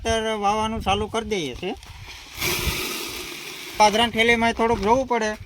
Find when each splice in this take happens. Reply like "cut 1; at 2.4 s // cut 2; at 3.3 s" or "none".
cut 1; at 3.8 s